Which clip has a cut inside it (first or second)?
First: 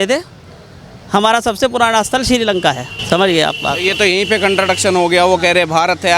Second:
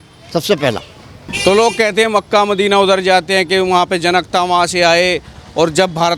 first